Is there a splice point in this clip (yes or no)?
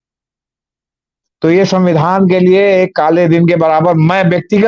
no